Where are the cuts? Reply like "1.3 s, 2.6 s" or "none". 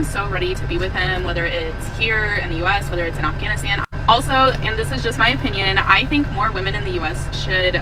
none